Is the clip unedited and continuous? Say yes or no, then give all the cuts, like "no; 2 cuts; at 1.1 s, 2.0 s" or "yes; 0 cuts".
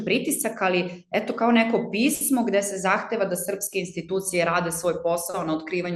yes; 0 cuts